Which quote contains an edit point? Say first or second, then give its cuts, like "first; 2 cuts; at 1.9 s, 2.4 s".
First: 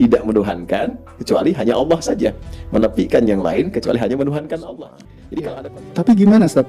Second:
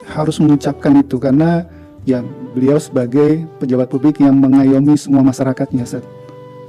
first; 1 cut; at 5.6 s